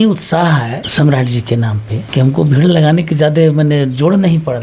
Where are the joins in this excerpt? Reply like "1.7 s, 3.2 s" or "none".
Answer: 0.8 s, 2.0 s

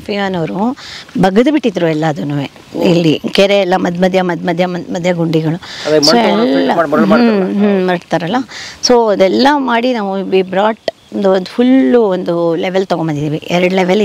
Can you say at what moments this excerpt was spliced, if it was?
none

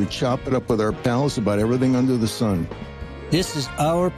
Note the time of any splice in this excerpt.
2.7 s

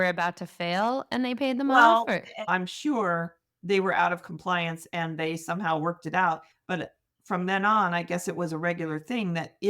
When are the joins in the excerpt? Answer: 2.5 s

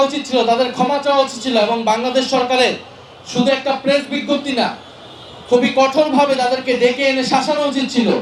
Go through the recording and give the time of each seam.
none

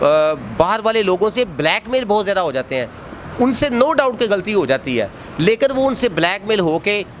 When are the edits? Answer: none

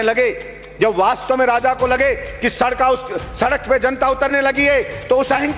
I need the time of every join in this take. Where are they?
none

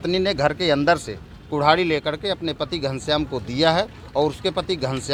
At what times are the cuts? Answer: none

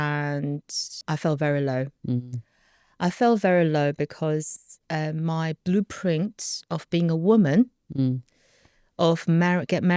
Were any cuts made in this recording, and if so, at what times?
1.0 s

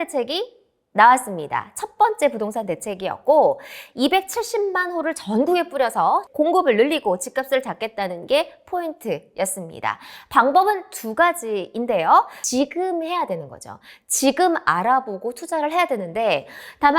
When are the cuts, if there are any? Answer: 6.3 s, 12.4 s

